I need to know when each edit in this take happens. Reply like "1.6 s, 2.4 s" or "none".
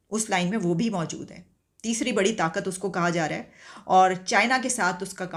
none